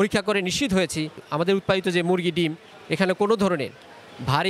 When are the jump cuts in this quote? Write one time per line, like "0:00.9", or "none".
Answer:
0:01.2